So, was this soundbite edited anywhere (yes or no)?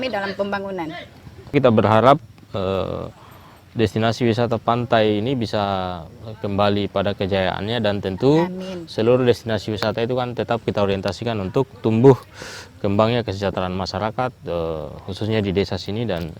yes